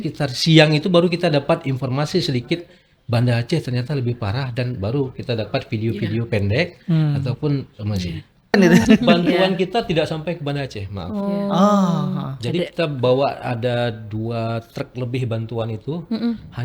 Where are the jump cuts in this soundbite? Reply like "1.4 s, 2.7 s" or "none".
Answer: 8.5 s